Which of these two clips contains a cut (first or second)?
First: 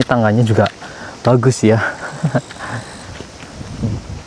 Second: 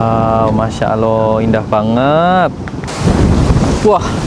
second